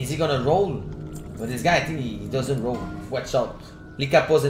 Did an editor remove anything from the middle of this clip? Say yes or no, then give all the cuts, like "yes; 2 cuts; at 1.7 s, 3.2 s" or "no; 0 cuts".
no; 0 cuts